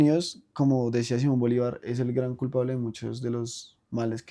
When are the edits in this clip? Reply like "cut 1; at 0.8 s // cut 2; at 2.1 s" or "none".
none